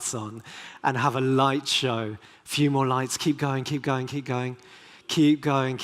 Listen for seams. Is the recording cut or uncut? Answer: cut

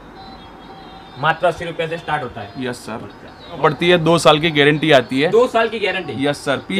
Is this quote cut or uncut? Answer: cut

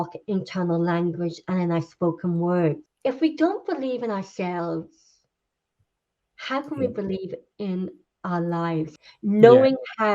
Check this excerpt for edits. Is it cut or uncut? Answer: cut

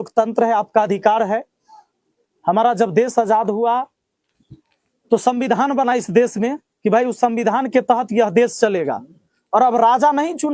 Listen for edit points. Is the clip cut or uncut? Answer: uncut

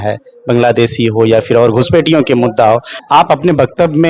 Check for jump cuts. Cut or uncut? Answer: cut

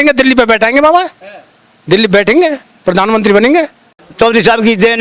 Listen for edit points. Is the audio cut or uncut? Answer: cut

